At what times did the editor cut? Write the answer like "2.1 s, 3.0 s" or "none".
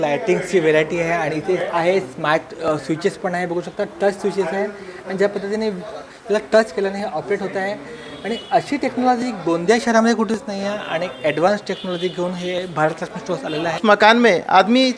13.8 s